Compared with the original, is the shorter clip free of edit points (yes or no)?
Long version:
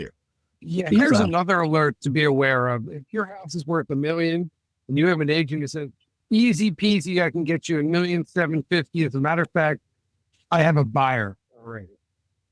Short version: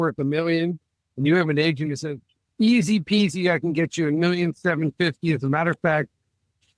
yes